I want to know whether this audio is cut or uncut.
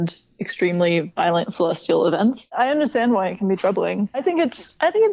cut